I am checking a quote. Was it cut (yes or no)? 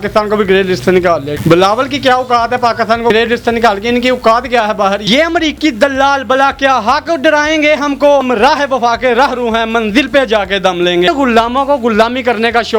yes